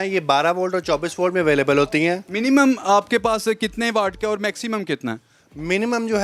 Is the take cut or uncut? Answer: cut